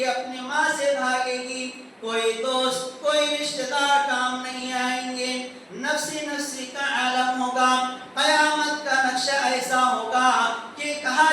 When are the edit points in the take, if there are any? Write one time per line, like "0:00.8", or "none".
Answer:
none